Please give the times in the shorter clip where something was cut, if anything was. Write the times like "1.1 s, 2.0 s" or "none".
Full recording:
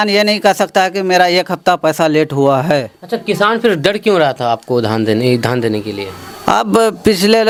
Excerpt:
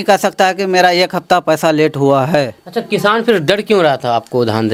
none